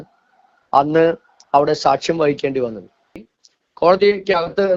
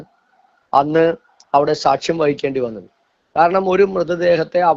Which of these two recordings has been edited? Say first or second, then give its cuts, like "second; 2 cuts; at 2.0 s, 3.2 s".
first; 1 cut; at 3.2 s